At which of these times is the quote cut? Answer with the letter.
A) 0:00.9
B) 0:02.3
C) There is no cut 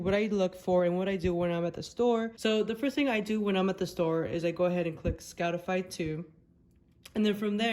B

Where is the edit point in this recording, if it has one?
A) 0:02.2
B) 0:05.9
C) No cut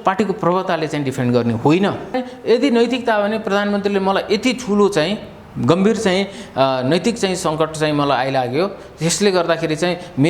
A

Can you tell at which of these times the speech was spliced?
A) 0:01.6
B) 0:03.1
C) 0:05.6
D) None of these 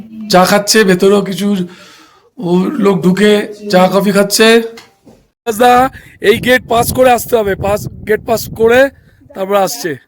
C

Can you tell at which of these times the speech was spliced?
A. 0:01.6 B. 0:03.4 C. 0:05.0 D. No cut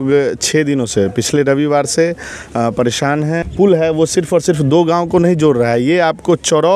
B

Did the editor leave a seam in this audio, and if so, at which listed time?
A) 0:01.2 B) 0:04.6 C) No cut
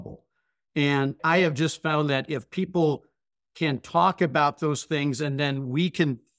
A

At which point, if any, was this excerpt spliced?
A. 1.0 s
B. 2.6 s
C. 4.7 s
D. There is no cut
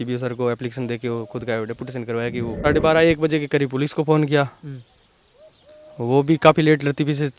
B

